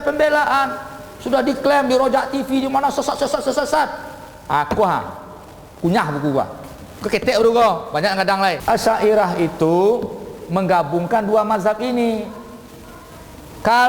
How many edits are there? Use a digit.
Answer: 1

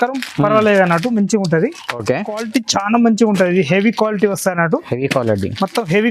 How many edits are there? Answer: 1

